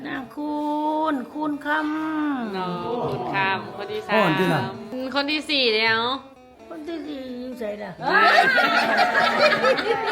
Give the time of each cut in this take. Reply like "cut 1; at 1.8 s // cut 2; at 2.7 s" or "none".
cut 1; at 4.9 s